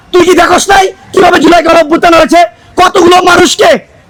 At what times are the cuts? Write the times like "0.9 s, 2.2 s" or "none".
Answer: none